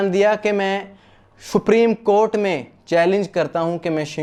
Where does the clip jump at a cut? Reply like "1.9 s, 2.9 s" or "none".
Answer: none